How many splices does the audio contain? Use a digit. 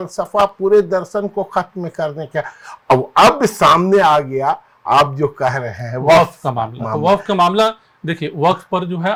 0